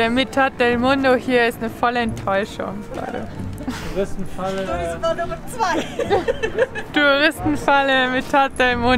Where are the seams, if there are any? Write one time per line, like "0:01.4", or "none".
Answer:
none